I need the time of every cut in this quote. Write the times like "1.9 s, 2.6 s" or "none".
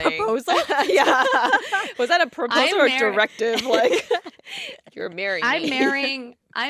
none